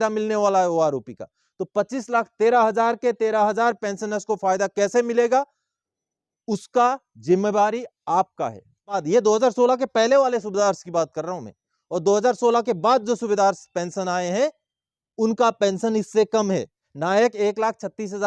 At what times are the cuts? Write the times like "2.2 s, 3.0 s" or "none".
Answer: 9.0 s, 16.8 s